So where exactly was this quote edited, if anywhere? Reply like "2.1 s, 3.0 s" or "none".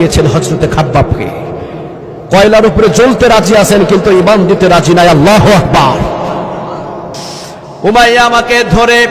7.7 s

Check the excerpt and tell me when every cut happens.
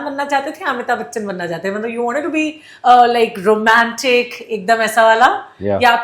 none

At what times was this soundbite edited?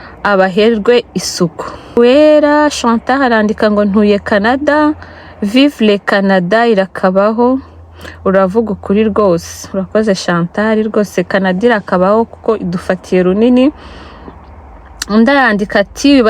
2.0 s

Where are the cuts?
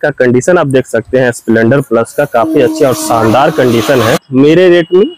4.2 s

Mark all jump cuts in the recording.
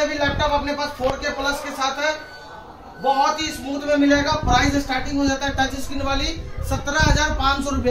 none

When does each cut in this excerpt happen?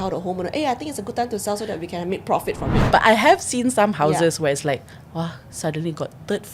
2.8 s

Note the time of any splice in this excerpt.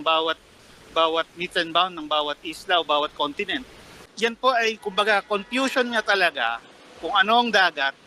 4.1 s

